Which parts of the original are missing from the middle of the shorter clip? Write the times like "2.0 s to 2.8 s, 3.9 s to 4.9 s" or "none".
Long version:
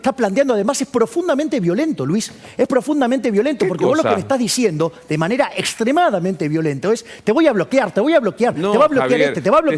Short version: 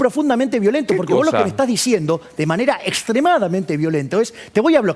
none